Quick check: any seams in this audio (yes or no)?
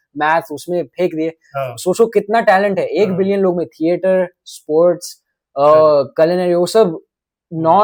no